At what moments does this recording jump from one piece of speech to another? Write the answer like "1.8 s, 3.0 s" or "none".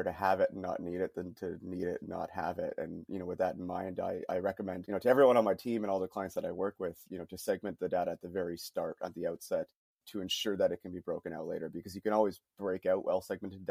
4.8 s, 10.0 s